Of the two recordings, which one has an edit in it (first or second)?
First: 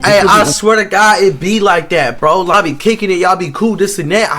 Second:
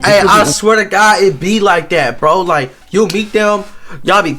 first